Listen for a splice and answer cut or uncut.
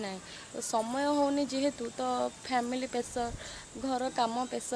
uncut